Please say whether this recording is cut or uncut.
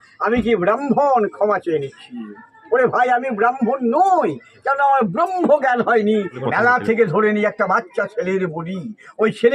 cut